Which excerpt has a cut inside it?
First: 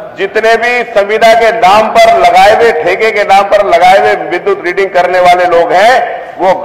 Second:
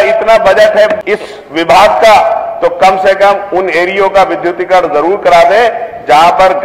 second; 1 cut; at 1.0 s

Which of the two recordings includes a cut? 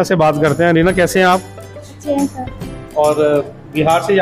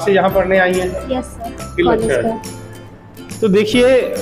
second; 1 cut; at 1.6 s

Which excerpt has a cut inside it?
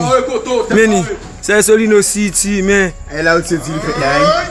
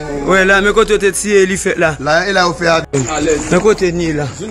second; 1 cut; at 2.9 s

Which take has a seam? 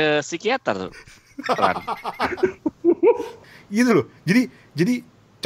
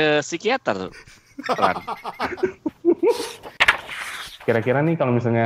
second; 1 cut; at 3.8 s

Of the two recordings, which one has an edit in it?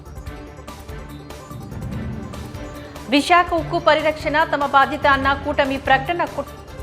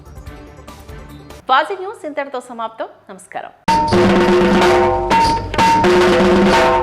first; 1 cut; at 0.9 s

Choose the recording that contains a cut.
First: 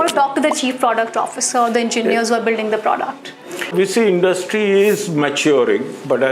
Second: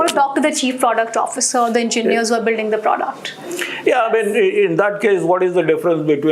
first; 1 cut; at 3.7 s

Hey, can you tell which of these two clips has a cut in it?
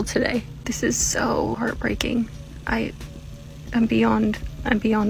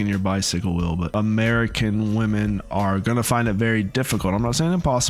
second; 1 cut; at 1.0 s

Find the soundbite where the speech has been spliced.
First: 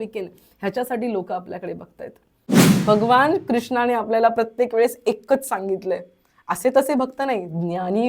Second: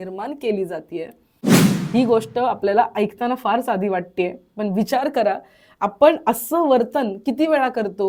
first; 1 cut; at 2.5 s

